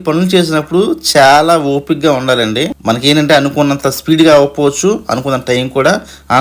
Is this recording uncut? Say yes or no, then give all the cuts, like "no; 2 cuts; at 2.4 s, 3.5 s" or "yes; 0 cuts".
yes; 0 cuts